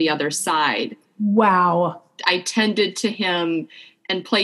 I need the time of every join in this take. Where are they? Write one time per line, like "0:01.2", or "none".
none